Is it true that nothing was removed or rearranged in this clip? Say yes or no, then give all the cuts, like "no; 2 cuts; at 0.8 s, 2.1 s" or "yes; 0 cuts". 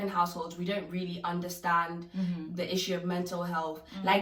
yes; 0 cuts